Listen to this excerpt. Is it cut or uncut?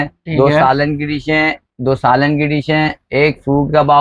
uncut